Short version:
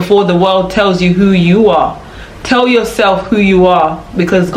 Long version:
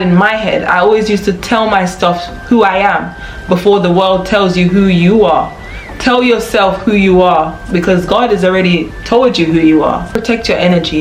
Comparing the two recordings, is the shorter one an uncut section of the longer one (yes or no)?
yes